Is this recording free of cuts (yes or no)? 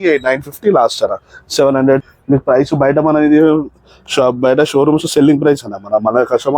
no